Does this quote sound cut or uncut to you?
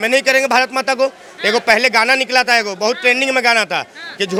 uncut